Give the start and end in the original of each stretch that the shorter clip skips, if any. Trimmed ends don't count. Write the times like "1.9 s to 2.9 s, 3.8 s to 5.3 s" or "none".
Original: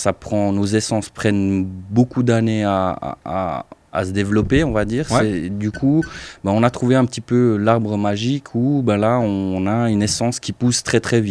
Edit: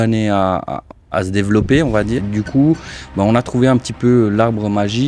3.2 s to 3.7 s, 5.0 s to 5.5 s